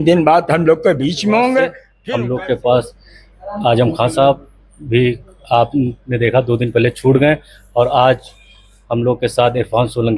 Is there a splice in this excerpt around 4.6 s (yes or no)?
no